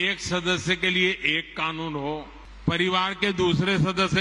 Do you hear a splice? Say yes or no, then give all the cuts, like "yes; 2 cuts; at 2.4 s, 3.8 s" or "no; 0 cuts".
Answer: yes; 1 cut; at 2.4 s